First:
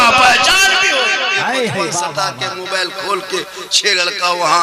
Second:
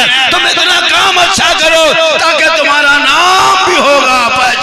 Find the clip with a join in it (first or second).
first